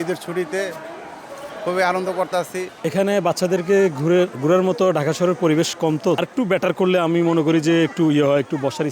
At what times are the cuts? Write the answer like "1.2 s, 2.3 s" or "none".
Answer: 2.8 s, 6.2 s